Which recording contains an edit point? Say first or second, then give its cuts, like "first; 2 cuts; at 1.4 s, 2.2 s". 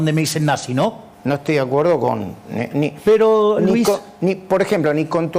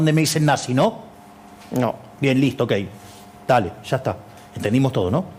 first; 1 cut; at 1.1 s